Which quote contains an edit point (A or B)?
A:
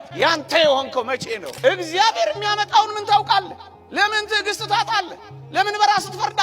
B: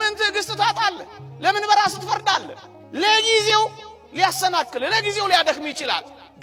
A